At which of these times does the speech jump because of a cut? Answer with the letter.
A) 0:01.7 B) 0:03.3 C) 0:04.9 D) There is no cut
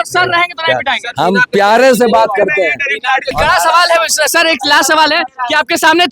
B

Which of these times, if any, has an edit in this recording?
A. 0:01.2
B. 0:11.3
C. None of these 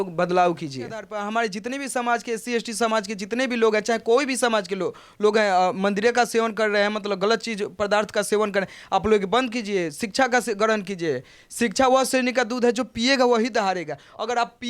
A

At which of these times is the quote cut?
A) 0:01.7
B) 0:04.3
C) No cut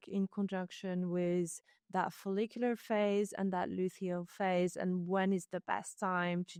C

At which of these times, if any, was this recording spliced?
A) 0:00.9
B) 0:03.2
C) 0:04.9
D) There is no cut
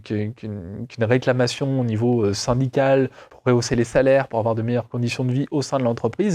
B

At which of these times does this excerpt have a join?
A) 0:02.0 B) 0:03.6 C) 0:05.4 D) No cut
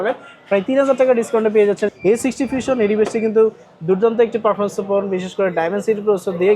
A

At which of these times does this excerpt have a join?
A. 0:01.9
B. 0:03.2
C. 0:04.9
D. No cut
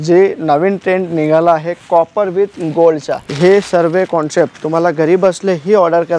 B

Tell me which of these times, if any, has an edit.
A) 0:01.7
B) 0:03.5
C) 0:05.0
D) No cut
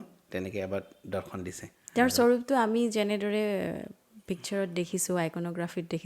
A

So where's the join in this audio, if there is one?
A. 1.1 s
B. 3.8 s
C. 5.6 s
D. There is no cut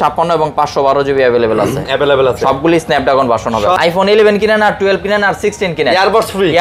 B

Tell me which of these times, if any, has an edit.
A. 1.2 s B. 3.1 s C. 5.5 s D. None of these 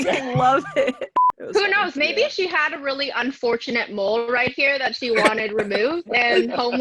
A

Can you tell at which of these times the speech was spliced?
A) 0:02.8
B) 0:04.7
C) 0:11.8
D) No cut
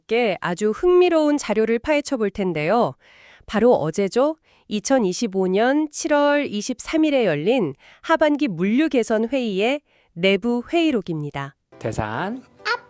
C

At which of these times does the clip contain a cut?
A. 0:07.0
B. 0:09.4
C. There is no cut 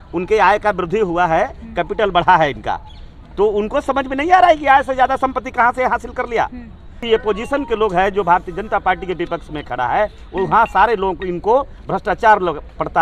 A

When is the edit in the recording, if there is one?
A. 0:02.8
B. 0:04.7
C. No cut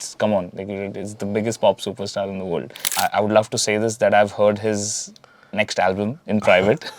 A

